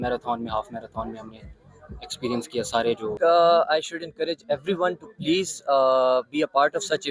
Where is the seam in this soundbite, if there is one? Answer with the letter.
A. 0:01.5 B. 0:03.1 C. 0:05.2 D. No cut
B